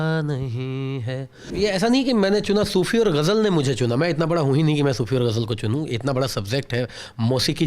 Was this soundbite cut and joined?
yes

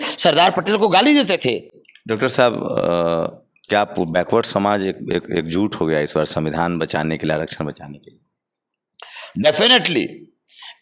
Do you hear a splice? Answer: no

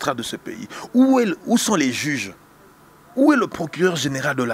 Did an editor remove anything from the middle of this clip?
no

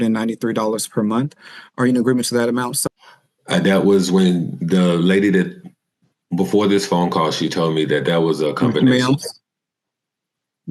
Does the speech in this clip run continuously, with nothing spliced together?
yes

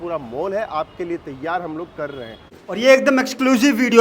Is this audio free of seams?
no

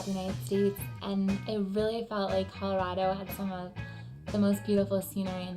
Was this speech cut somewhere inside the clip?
yes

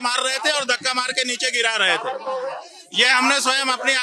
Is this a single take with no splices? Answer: yes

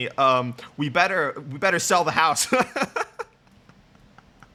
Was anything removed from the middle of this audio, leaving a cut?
no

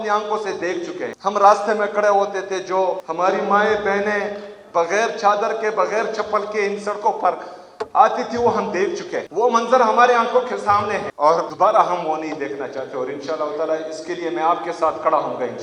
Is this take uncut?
yes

